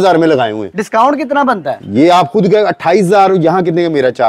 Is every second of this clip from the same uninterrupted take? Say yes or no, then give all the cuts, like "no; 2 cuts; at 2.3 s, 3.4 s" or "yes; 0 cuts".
yes; 0 cuts